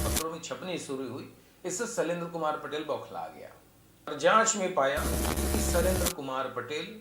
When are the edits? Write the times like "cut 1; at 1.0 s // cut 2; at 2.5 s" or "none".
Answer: cut 1; at 4.1 s